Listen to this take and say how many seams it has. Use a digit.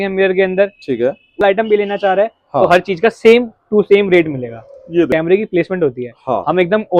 2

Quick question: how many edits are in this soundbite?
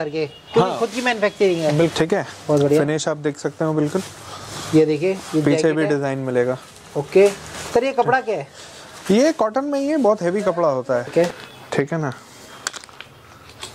2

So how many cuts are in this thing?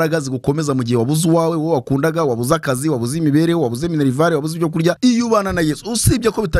1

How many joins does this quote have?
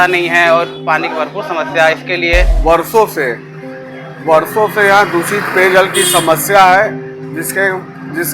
1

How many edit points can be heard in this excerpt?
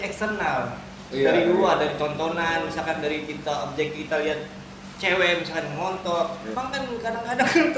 1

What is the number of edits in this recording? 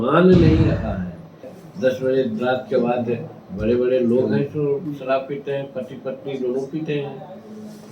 1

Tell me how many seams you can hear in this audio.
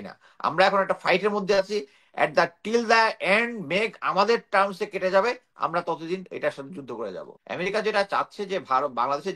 1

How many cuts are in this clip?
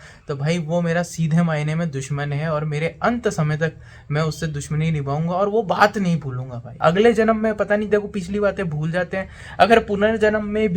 1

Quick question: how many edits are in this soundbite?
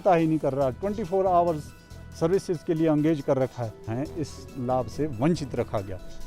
1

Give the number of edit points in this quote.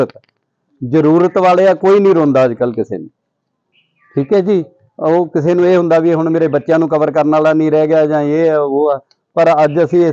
0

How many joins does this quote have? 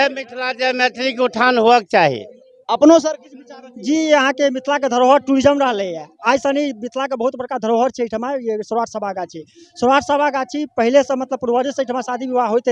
0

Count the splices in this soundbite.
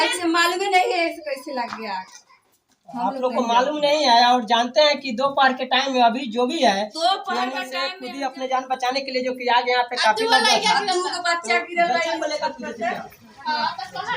1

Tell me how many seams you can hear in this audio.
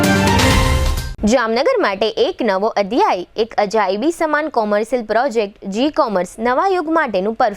1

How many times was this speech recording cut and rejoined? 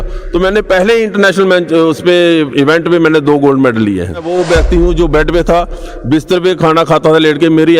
1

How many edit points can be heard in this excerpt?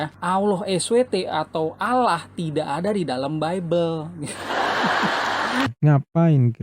1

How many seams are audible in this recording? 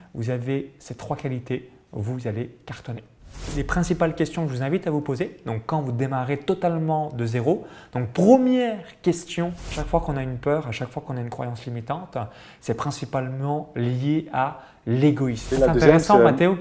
3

